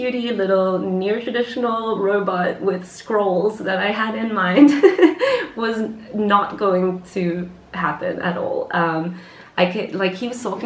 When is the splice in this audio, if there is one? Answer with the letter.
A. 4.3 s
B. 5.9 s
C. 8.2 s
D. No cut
D